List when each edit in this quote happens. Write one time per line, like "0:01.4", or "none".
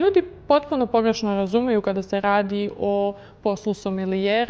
none